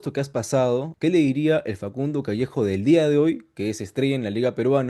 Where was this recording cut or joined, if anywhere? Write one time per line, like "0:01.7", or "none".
0:00.9